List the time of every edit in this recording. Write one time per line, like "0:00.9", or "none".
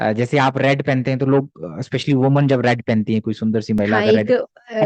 none

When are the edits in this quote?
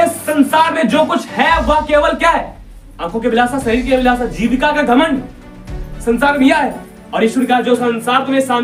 none

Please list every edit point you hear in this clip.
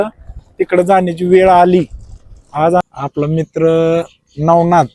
0:02.8

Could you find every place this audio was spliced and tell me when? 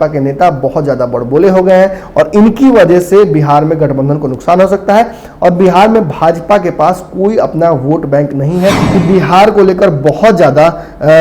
0:08.9

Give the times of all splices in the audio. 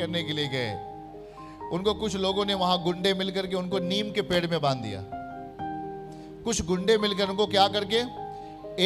0:05.1
0:06.4

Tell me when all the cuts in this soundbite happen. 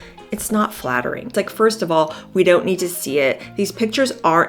0:01.3

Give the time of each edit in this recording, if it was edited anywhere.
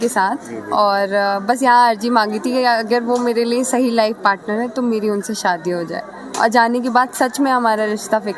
none

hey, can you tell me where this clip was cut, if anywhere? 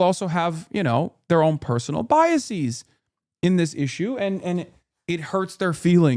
none

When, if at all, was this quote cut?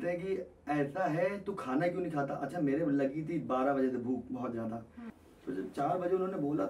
0:05.1

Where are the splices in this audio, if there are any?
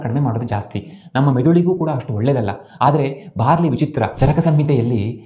0:04.1

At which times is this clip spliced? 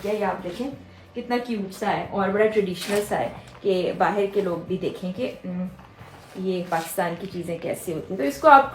none

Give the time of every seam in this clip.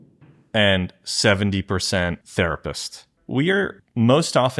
0:03.1

